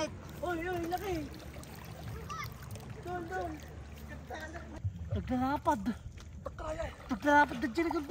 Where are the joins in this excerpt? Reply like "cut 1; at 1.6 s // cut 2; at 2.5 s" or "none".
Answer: cut 1; at 4.8 s